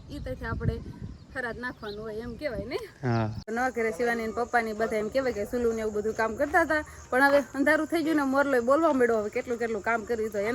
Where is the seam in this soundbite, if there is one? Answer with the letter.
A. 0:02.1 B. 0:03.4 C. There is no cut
B